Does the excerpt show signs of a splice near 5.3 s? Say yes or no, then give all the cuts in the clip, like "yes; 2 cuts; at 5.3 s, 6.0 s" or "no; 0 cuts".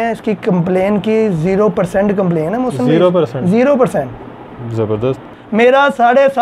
yes; 1 cut; at 5.3 s